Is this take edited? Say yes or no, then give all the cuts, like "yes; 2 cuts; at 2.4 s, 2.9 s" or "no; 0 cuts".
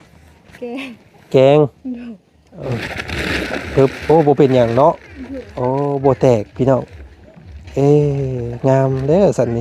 yes; 1 cut; at 2.7 s